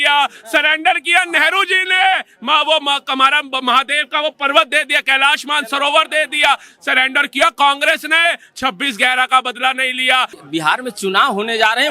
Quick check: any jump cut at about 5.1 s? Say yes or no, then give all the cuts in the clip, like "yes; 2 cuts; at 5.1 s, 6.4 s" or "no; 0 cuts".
no; 1 cut; at 10.4 s